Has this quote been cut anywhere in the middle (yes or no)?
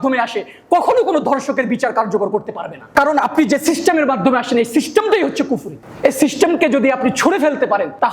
no